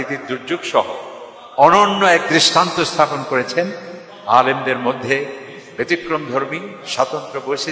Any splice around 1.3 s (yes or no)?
yes